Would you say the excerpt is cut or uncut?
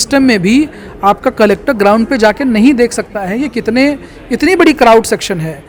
uncut